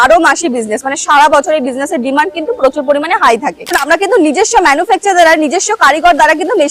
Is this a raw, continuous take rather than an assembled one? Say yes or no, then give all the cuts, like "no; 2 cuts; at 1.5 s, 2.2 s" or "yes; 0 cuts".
no; 1 cut; at 3.8 s